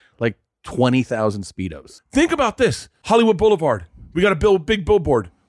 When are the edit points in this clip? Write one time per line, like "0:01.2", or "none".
0:01.9
0:02.9